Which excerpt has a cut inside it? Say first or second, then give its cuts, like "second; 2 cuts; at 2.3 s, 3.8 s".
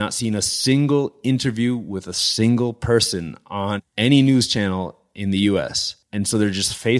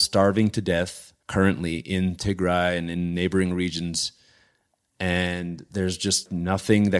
first; 1 cut; at 3.8 s